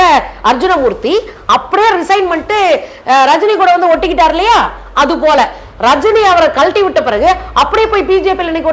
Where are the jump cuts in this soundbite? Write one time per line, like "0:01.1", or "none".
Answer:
none